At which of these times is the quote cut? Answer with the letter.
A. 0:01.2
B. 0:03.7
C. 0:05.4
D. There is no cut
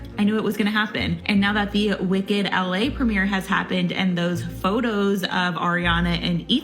A